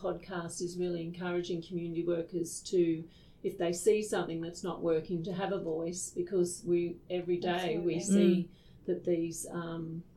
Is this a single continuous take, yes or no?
yes